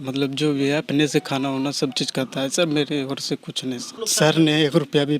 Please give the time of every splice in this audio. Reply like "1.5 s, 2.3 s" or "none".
3.9 s